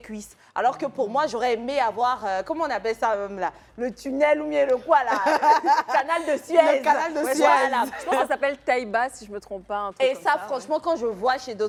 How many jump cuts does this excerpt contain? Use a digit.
0